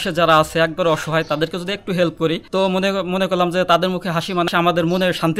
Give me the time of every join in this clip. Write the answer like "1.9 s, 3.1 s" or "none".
4.5 s

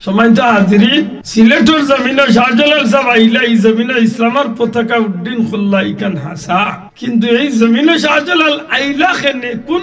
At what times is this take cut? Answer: 1.2 s, 6.9 s

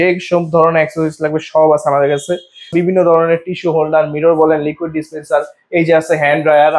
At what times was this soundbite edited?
2.7 s

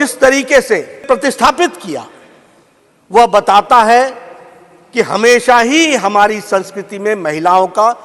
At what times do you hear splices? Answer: 1.0 s

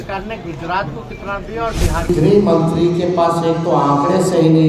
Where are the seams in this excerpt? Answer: 2.1 s

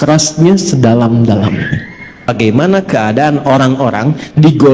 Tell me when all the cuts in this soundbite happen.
2.3 s

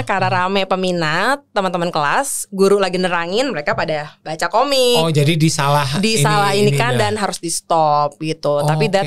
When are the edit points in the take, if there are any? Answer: none

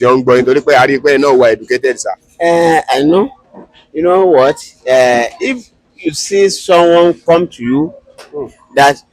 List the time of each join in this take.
none

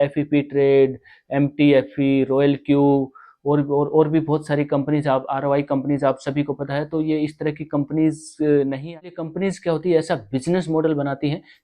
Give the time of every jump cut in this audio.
8.8 s

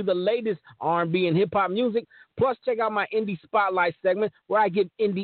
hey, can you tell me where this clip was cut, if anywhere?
4.1 s

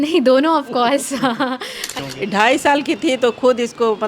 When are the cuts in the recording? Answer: 2.0 s

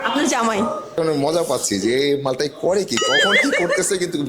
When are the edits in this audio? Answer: 1.0 s

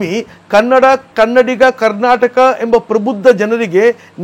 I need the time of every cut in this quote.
none

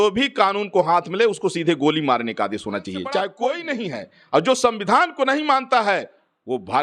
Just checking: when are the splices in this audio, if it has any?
3.3 s

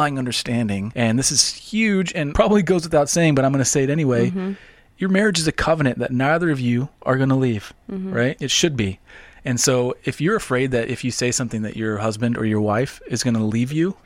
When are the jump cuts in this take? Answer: 0.9 s, 2.3 s, 8.5 s

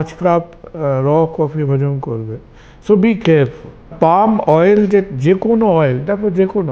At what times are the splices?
3.9 s

